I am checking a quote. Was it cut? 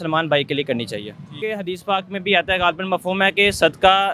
yes; 1 cut; at 1.3 s

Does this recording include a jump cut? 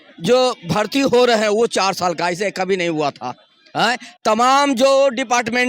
no; 0 cuts

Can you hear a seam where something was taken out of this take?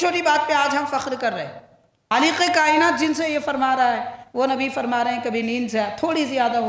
yes; 1 cut; at 2.1 s

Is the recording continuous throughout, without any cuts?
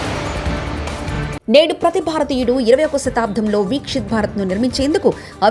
no; 1 cut; at 1.4 s

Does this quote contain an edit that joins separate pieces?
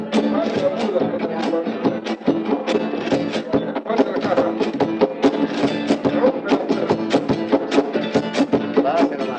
yes; 1 cut; at 7.9 s

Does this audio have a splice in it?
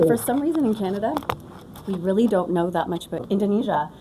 no; 0 cuts

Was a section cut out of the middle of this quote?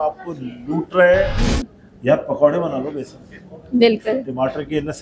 yes; 1 cut; at 1.4 s

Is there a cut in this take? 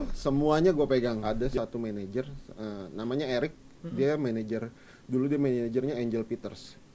yes; 1 cut; at 1.2 s

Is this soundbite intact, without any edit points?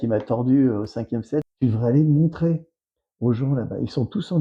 no; 1 cut; at 1.5 s

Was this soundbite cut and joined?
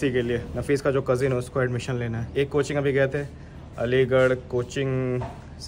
no; 0 cuts

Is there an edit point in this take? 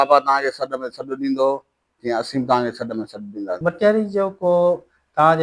yes; 1 cut; at 3.6 s

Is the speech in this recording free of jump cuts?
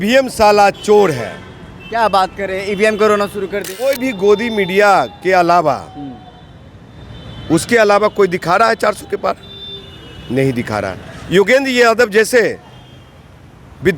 no; 1 cut; at 3.8 s

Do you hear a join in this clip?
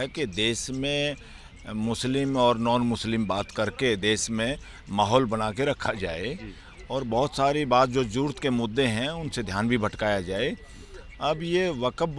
no; 0 cuts

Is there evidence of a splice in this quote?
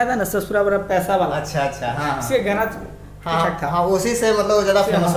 no; 0 cuts

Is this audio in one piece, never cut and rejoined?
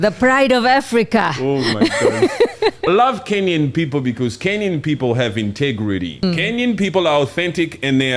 no; 2 cuts; at 2.9 s, 6.2 s

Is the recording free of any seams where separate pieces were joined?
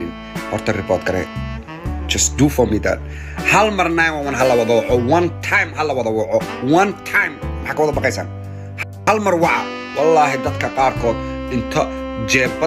yes; 0 cuts

